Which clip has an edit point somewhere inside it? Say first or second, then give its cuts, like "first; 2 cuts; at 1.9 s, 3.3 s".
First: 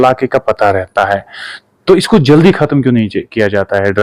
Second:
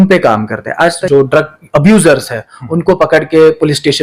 second; 1 cut; at 1.0 s